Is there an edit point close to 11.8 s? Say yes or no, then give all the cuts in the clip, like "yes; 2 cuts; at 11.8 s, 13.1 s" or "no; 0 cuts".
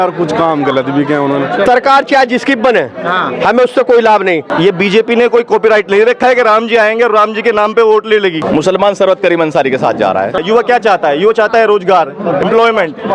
no; 4 cuts; at 1.7 s, 4.5 s, 8.4 s, 10.4 s